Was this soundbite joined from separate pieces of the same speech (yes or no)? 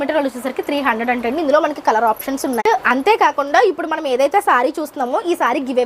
yes